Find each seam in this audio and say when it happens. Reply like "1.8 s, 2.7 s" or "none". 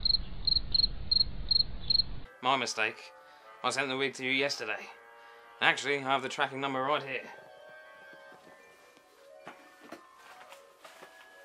2.2 s